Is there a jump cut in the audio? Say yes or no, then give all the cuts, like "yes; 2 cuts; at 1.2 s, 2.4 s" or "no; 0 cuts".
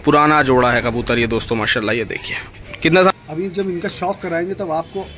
yes; 1 cut; at 3.1 s